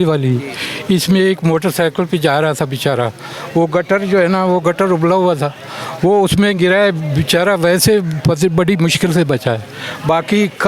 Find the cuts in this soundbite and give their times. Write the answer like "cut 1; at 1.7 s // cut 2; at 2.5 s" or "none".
none